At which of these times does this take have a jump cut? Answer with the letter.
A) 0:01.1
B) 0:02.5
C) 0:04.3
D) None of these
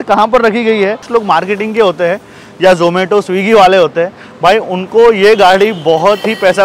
A